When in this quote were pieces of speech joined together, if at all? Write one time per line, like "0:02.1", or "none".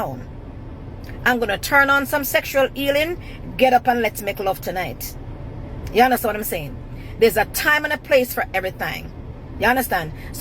none